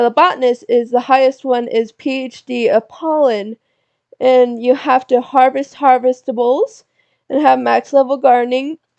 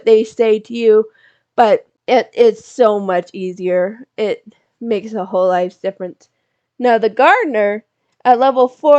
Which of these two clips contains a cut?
second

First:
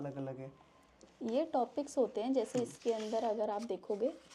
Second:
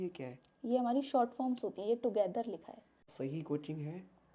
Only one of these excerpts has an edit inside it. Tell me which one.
second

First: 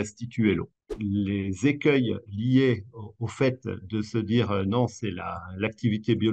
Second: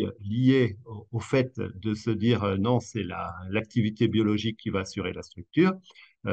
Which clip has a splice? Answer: first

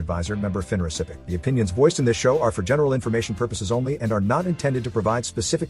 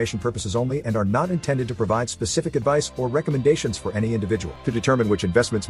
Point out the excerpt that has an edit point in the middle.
first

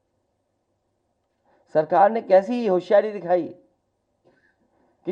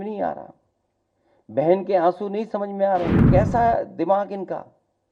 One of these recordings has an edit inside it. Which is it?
second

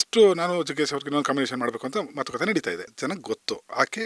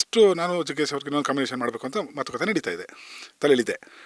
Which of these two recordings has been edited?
first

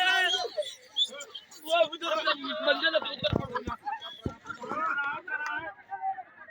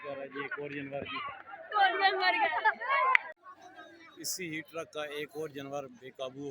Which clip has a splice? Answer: second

